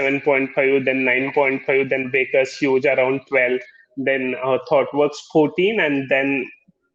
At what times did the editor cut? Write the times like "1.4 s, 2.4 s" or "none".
none